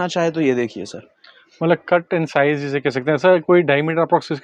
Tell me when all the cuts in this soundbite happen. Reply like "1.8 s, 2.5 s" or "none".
none